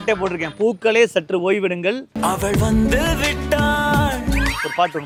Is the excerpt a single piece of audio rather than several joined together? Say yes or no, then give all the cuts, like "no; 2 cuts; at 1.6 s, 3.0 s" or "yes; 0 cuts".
yes; 0 cuts